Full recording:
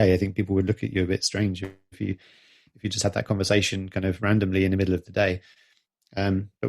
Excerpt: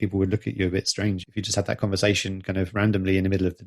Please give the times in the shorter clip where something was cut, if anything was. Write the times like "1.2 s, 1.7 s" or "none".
1.2 s

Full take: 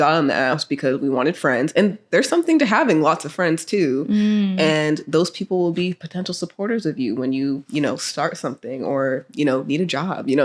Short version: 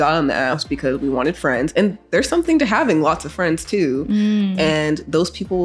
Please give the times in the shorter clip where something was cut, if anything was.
none

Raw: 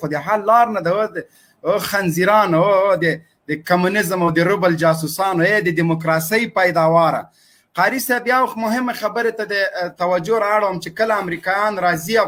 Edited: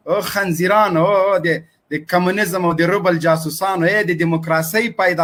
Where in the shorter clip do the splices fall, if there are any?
none

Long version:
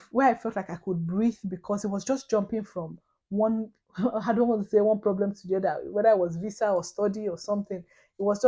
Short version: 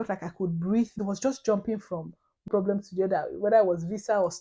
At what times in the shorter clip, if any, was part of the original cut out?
1.0 s, 2.5 s

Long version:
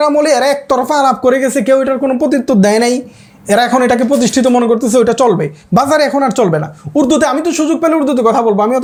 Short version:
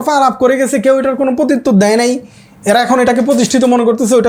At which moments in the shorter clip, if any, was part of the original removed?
none

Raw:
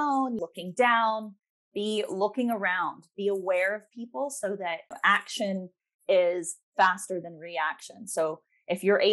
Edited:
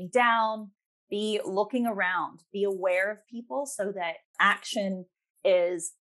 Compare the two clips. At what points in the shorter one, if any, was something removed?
none

